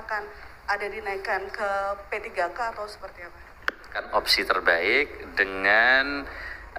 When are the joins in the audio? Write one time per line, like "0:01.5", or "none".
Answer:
0:04.0